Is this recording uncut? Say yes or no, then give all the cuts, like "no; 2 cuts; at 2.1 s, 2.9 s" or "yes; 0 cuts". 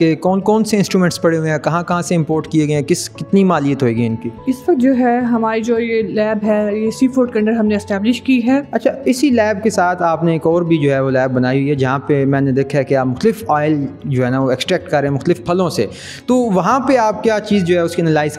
no; 2 cuts; at 4.4 s, 8.7 s